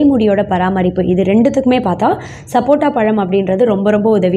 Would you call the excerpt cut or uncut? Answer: uncut